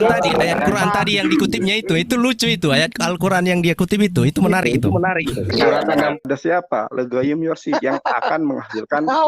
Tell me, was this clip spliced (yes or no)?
yes